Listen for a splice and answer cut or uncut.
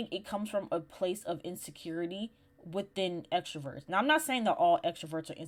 uncut